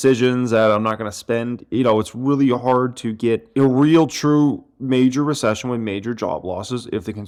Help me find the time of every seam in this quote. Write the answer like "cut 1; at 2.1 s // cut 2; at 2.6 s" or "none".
none